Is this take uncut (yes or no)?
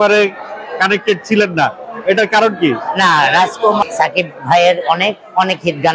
no